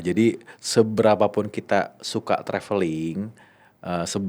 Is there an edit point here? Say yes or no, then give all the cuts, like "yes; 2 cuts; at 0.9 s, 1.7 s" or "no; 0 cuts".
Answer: no; 0 cuts